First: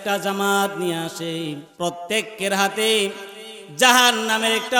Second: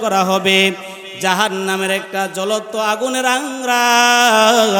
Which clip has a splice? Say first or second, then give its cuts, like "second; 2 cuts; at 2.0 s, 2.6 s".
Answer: first; 1 cut; at 1.7 s